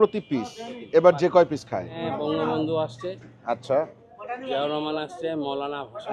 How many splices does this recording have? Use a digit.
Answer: 1